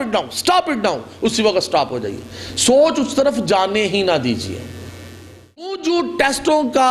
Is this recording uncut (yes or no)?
no